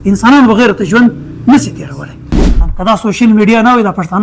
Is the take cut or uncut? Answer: cut